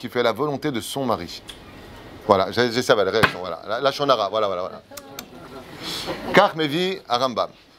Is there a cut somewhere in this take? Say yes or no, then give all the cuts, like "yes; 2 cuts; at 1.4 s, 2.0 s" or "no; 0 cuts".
no; 0 cuts